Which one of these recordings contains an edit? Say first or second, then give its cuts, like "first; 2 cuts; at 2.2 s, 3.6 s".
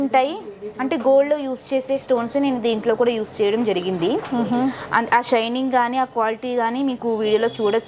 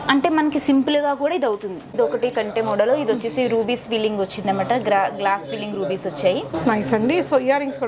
second; 1 cut; at 1.9 s